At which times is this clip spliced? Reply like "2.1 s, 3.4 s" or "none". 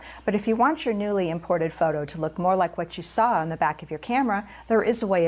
2.6 s